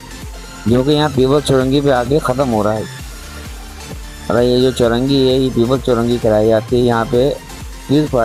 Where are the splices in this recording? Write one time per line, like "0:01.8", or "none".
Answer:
none